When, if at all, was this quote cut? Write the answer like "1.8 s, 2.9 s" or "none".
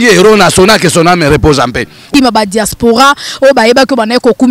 2.1 s